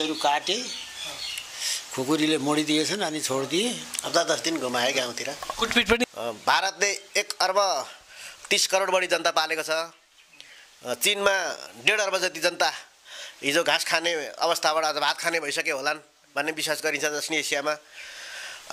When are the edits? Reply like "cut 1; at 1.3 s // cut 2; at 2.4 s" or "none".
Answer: cut 1; at 6.1 s